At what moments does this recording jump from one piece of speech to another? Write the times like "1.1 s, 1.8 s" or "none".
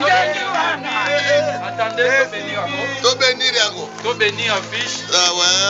none